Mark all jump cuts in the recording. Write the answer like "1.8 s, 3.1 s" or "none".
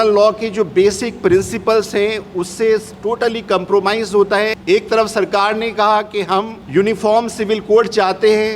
4.6 s, 6.6 s